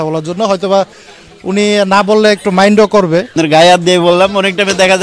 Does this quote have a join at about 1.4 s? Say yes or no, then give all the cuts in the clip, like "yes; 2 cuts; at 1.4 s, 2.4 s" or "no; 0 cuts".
no; 1 cut; at 3.3 s